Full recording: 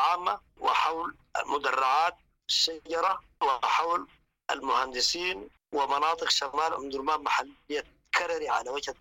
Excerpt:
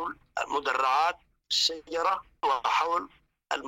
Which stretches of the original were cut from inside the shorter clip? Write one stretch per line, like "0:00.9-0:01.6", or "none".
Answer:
none